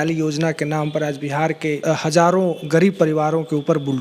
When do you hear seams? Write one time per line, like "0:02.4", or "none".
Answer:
0:01.8